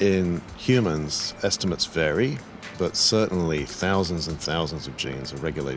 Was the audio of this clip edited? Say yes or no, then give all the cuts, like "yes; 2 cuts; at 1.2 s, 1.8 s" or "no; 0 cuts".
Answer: yes; 1 cut; at 1.2 s